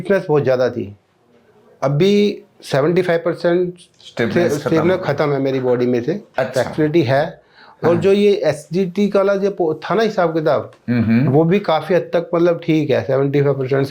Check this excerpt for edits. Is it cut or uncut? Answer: uncut